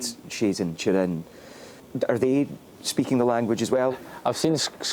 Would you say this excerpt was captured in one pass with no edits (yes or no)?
no